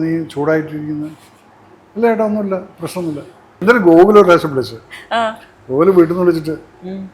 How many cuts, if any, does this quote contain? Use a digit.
1